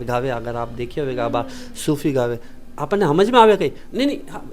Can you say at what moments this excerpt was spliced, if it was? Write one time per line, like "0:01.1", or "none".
none